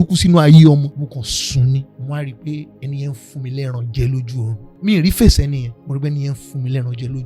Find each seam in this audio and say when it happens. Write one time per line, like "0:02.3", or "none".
0:00.9
0:01.9
0:02.7
0:04.6
0:05.7

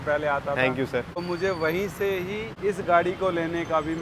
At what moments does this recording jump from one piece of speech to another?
0:01.2
0:02.5

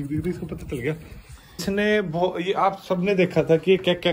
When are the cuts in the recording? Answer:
0:01.6

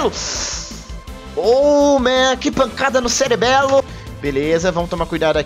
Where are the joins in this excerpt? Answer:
0:03.9

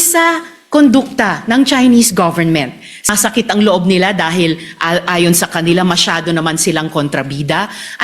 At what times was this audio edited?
0:03.1

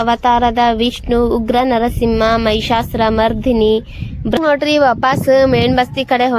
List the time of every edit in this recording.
0:04.4

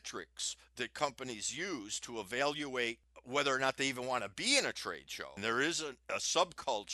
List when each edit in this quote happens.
0:03.1
0:05.4
0:06.0

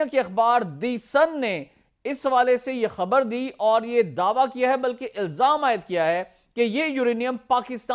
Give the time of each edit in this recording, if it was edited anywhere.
none

